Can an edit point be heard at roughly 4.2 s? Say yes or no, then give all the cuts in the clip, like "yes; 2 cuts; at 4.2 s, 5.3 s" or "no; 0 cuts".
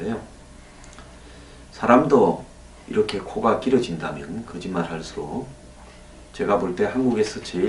no; 1 cut; at 2.4 s